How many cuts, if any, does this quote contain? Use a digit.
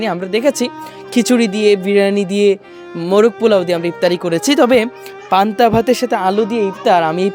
0